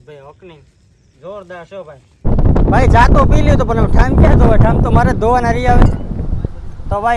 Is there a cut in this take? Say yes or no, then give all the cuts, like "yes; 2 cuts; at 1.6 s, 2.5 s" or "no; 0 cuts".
yes; 1 cut; at 2.2 s